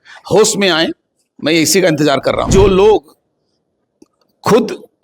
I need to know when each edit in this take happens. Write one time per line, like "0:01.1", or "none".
0:02.5